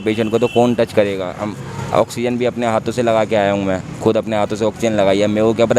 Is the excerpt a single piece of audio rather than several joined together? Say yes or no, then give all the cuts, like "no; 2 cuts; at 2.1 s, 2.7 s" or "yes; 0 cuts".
yes; 0 cuts